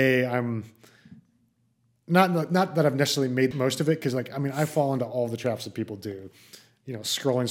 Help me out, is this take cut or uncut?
cut